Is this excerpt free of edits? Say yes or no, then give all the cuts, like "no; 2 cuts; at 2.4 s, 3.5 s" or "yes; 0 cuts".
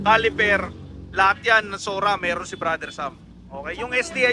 yes; 0 cuts